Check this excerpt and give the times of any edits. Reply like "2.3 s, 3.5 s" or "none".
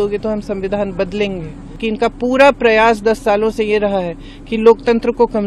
1.7 s

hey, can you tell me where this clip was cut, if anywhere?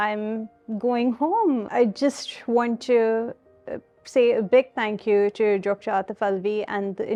none

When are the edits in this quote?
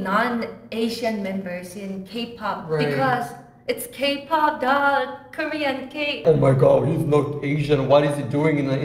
6.2 s

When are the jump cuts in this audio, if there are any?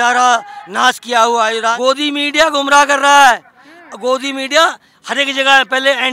1.8 s

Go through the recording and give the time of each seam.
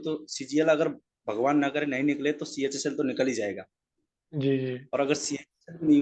none

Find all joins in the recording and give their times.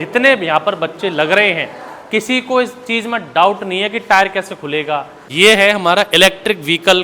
5.2 s

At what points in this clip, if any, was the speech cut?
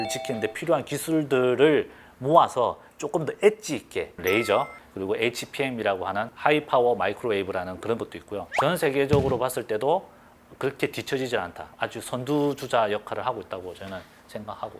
4.1 s, 6.3 s, 8.4 s, 11.6 s

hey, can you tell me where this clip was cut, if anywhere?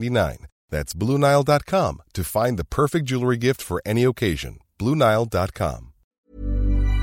6.0 s

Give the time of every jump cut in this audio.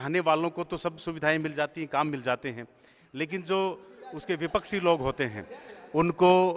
none

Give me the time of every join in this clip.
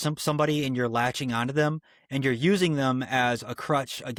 none

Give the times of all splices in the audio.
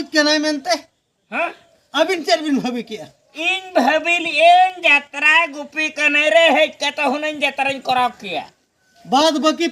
none

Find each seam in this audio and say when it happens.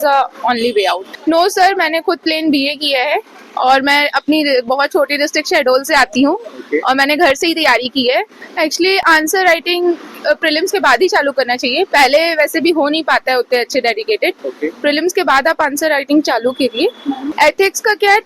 1.1 s, 8.4 s, 17.3 s

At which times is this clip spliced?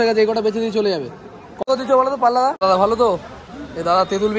1.5 s, 2.6 s

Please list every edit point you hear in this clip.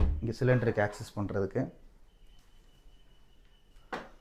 none

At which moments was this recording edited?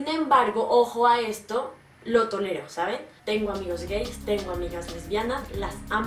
1.1 s, 3.1 s

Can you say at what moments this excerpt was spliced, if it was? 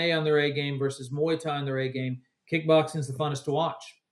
none

